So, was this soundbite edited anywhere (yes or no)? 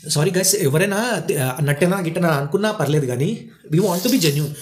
no